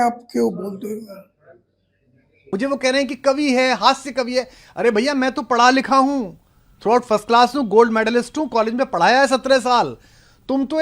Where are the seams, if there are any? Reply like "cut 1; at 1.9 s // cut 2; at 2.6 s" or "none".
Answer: cut 1; at 2.5 s